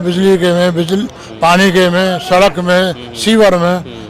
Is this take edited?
no; 0 cuts

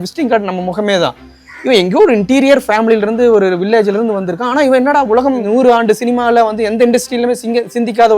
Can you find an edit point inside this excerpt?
yes; 1 cut; at 5.4 s

